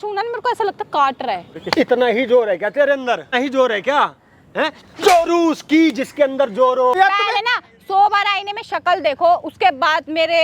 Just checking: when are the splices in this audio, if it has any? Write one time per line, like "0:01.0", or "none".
0:01.6
0:03.4
0:06.9